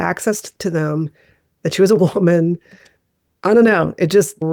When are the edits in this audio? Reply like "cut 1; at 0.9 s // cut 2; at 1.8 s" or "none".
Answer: none